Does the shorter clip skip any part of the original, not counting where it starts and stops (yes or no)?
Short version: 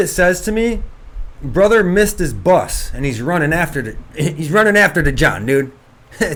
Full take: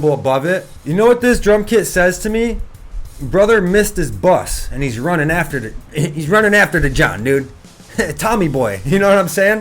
no